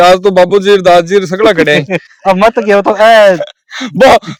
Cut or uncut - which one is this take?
uncut